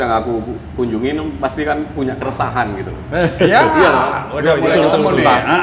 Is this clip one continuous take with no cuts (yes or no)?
yes